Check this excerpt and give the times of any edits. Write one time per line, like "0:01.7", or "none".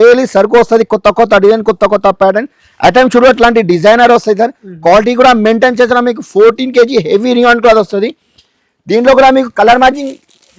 none